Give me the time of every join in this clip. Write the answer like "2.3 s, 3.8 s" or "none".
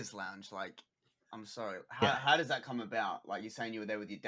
none